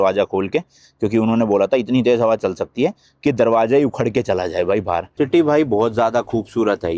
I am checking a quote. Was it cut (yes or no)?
yes